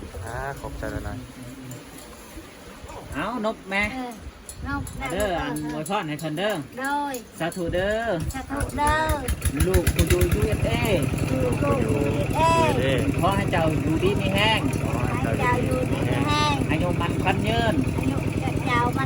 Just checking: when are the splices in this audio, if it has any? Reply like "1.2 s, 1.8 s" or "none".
none